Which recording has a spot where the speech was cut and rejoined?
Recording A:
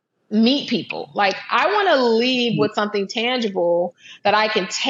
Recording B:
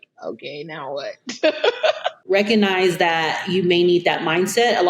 B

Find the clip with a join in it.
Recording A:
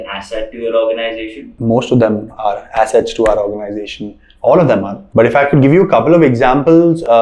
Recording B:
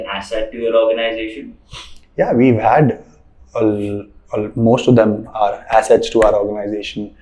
A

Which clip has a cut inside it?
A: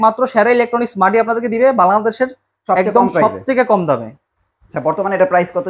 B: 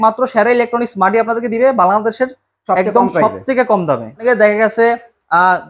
B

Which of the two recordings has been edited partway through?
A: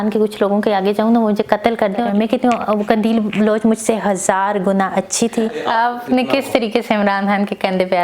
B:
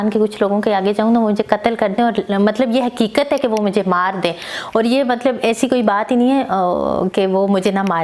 A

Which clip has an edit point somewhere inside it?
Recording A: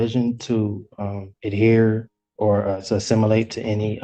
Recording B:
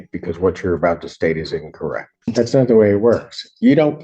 B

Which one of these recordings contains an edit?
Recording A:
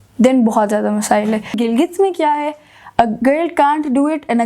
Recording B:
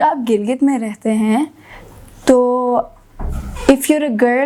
A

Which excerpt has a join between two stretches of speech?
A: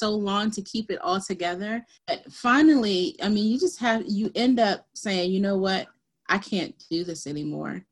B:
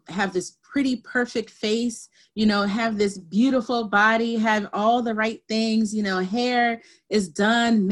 A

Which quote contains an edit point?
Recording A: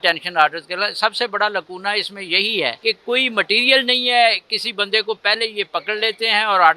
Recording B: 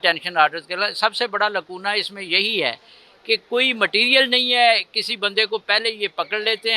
A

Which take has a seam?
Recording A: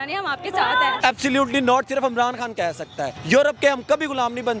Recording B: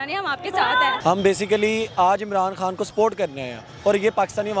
A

